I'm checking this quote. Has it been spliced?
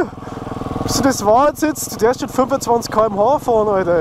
no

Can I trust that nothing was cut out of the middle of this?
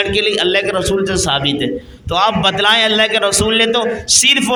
yes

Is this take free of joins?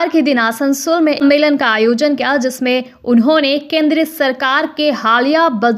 no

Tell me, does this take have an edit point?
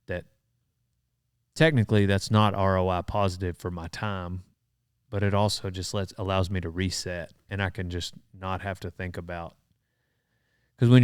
yes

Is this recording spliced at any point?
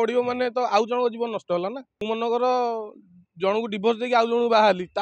yes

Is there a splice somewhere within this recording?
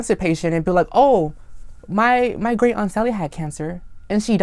no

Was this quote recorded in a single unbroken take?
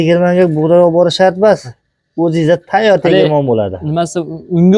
yes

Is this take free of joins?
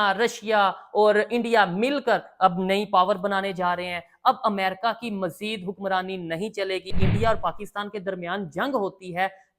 no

